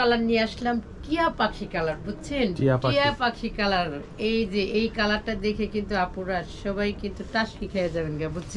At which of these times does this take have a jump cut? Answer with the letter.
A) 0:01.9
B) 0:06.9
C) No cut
C